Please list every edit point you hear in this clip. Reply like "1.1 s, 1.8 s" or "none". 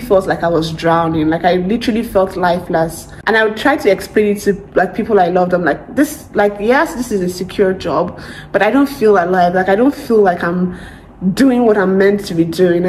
none